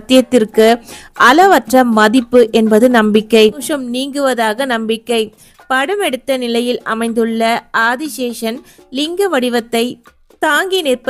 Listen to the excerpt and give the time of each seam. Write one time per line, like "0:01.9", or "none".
0:03.7